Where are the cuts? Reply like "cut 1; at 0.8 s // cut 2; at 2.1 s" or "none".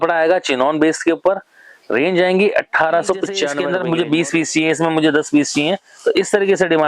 cut 1; at 3.6 s

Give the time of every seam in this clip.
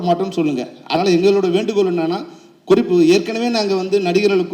cut 1; at 1.0 s

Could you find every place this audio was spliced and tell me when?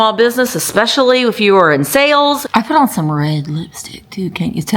cut 1; at 2.4 s

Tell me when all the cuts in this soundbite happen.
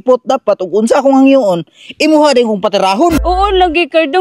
cut 1; at 3.2 s

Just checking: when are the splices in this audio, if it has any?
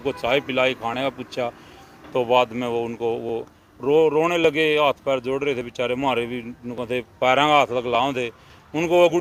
none

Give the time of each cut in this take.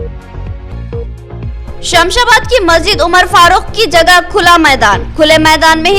cut 1; at 1.5 s

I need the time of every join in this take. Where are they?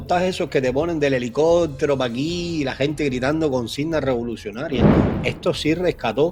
none

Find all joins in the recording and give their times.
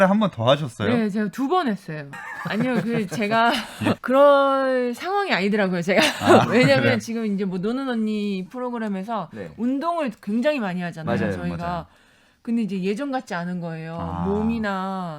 cut 1; at 2.3 s

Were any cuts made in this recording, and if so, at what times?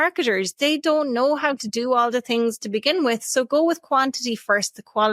none

